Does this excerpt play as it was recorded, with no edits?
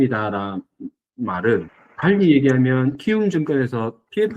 no; 1 cut; at 1.8 s

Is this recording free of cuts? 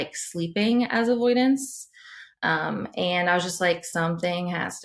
yes; 0 cuts

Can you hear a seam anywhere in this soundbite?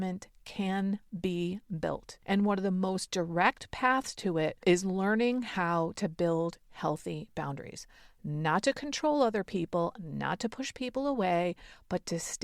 yes; 2 cuts; at 2.1 s, 4.6 s

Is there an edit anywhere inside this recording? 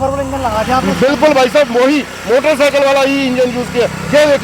no; 0 cuts

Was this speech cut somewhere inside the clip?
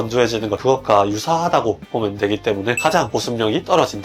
yes; 1 cut; at 2.8 s

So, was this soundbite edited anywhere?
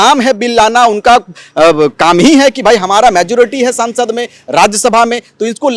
no; 0 cuts

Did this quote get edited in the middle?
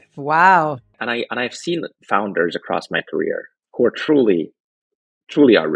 yes; 2 cuts; at 0.9 s, 3.6 s

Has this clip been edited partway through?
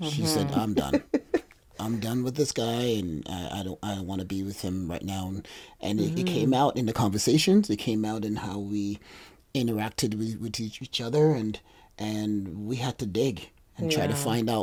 no; 0 cuts

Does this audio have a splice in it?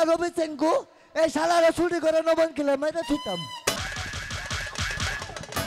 yes; 1 cut; at 3.8 s

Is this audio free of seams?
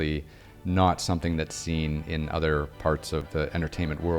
no; 1 cut; at 3.3 s

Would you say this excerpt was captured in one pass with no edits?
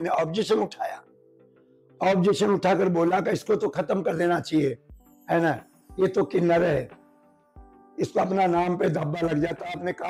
yes; 0 cuts

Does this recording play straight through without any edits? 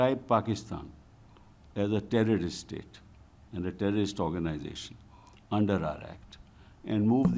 yes; 0 cuts

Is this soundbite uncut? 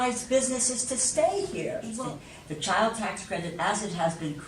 no; 1 cut; at 1.9 s

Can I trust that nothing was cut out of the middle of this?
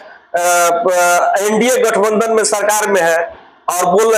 yes; 0 cuts

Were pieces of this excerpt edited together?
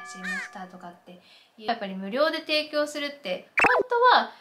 yes; 1 cut; at 1.7 s

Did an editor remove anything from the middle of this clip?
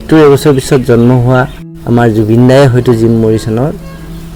no; 0 cuts

